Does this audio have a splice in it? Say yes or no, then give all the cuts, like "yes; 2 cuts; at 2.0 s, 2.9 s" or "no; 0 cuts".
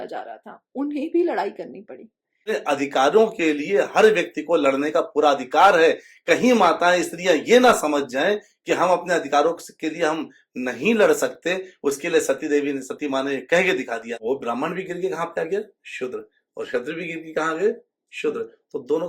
yes; 2 cuts; at 2.4 s, 14.1 s